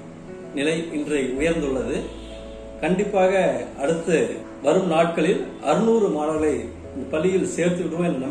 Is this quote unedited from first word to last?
yes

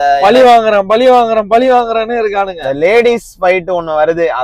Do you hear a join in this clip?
no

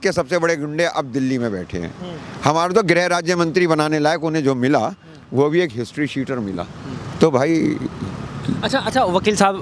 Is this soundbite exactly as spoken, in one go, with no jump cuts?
yes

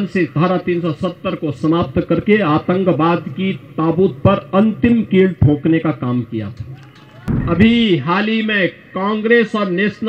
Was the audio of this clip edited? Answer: yes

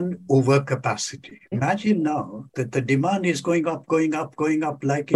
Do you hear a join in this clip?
yes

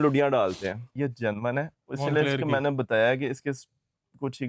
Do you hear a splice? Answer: yes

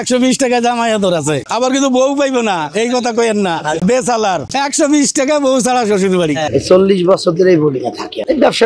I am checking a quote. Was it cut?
no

